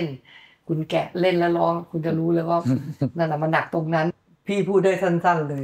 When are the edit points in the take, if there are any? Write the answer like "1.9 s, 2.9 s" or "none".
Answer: 4.2 s